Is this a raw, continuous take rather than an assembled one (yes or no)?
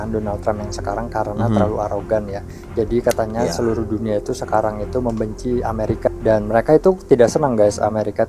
yes